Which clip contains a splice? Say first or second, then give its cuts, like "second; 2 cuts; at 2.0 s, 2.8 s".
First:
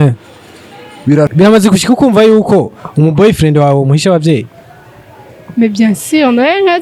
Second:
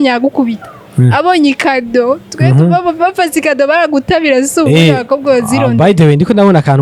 first; 1 cut; at 1.3 s